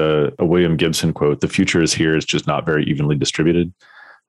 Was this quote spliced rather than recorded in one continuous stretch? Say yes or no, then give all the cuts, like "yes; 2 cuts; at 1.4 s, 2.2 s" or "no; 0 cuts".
no; 0 cuts